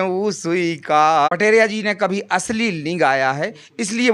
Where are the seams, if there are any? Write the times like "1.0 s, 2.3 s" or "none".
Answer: 1.3 s